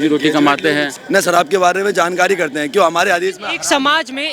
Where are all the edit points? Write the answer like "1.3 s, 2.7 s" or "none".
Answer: 0.9 s